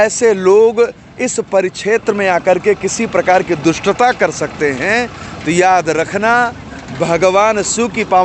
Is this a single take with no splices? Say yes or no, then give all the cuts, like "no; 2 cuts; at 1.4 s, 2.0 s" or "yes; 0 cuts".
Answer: yes; 0 cuts